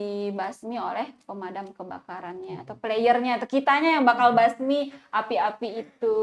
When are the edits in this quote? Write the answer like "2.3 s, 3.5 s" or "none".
none